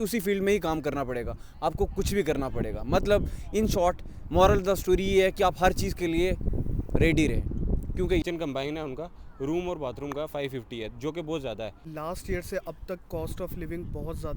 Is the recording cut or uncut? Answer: cut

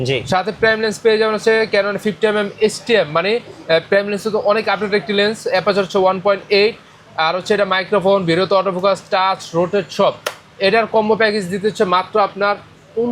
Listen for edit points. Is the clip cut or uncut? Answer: uncut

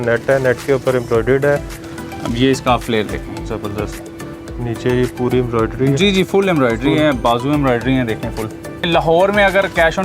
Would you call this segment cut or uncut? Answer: cut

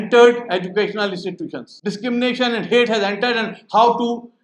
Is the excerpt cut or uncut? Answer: cut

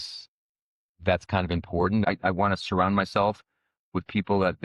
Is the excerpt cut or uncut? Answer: cut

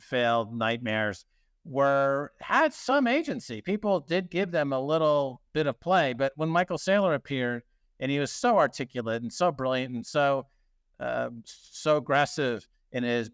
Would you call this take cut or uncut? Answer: uncut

